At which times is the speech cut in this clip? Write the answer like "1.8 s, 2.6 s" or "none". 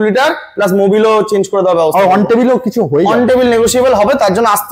none

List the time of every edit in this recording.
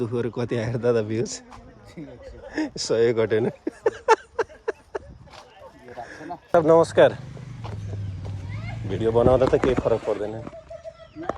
6.5 s

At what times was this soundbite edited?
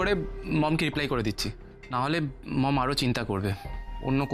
none

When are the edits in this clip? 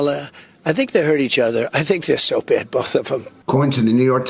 3.3 s

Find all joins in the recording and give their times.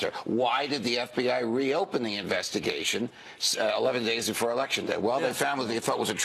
none

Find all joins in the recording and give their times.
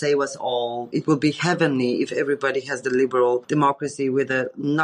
0.9 s, 3.5 s

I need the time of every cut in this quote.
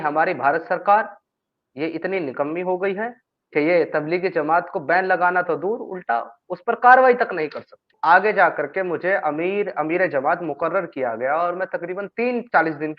7.9 s

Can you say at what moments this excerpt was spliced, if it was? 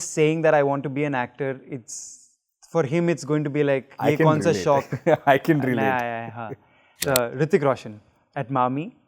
7.0 s

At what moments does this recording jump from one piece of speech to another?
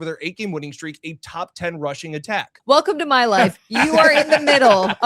2.5 s

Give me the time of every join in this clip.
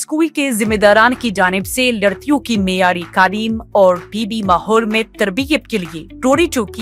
none

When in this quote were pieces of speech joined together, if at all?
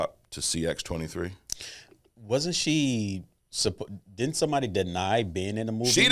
none

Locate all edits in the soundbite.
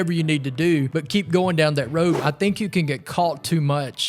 1.0 s, 2.2 s

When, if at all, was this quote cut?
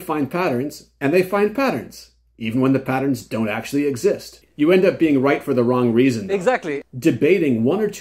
4.4 s, 6.8 s

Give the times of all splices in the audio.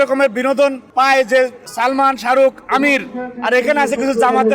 0.8 s, 1.6 s

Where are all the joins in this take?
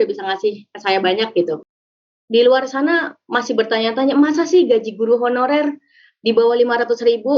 1.6 s

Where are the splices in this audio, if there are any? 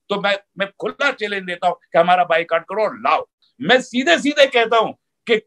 3.5 s

